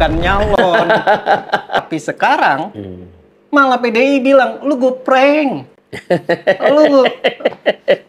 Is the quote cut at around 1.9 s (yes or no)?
yes